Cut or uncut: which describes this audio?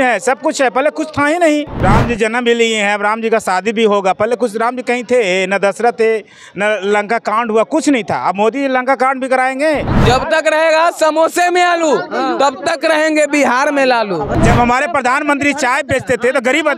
cut